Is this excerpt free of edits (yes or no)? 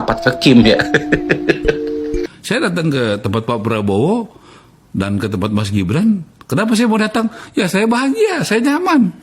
no